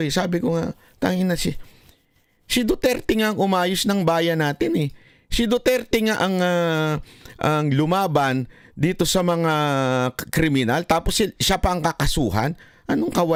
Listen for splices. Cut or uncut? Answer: uncut